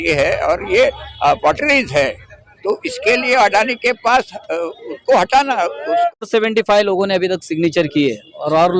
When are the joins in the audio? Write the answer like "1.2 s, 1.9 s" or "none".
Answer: 6.2 s